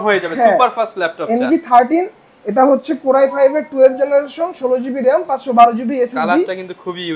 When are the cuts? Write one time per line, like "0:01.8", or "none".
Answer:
none